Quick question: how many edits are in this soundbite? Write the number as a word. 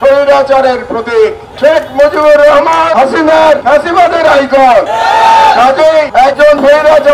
four